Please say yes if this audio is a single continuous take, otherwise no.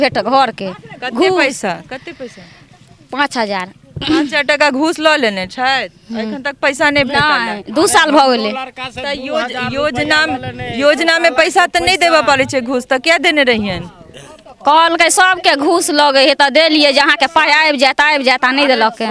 yes